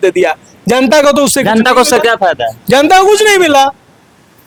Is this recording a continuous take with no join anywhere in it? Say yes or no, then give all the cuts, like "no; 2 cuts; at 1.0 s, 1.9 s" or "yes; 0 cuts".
yes; 0 cuts